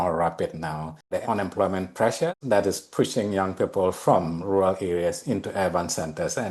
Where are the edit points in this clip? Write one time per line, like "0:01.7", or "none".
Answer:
0:01.2
0:02.4